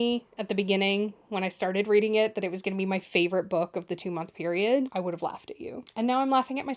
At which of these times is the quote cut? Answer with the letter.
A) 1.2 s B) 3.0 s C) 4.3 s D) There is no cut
D